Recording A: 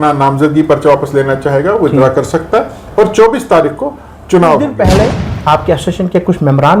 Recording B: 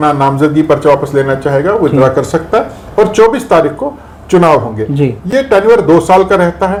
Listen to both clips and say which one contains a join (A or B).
A